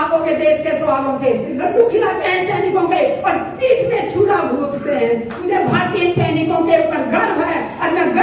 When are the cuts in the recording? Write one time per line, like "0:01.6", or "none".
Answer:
0:01.6
0:05.5